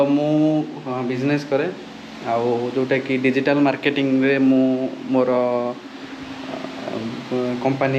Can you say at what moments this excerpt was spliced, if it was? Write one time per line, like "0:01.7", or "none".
none